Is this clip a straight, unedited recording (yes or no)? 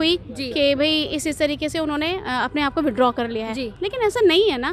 yes